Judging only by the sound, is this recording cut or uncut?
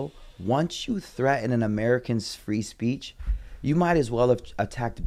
uncut